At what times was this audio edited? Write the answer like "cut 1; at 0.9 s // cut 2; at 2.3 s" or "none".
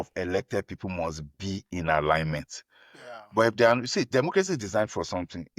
none

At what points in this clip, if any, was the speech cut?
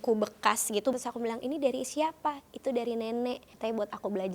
cut 1; at 0.9 s // cut 2; at 3.5 s

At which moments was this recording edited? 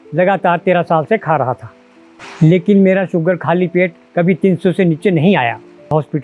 none

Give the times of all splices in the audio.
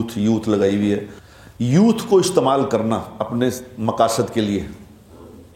cut 1; at 1.2 s

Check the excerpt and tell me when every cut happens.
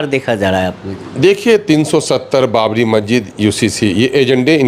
none

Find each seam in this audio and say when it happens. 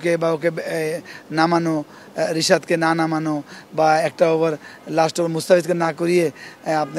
none

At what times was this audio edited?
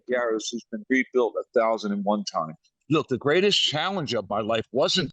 cut 1; at 2.7 s

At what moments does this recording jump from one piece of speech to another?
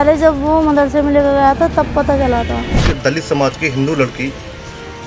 cut 1; at 2.8 s

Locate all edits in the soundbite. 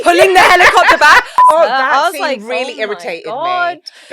cut 1; at 1.4 s

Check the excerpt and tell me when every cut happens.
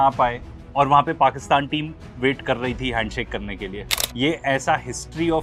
none

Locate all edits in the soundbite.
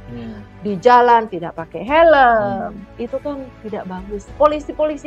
cut 1; at 4.1 s

